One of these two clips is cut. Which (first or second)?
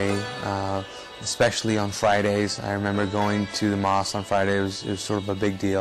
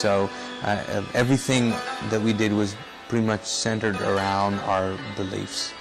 first